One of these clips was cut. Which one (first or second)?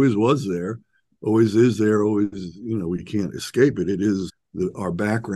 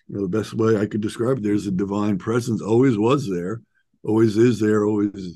first